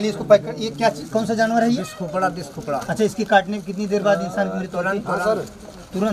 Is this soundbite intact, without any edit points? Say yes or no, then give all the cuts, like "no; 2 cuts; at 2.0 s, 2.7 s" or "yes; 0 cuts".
yes; 0 cuts